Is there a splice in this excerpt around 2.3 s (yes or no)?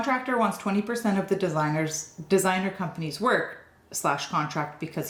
no